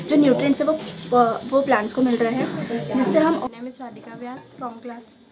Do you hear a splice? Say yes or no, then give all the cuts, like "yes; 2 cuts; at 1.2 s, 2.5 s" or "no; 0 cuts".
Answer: yes; 1 cut; at 3.4 s